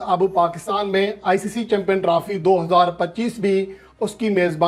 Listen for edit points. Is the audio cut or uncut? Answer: uncut